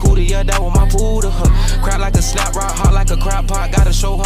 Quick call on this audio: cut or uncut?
uncut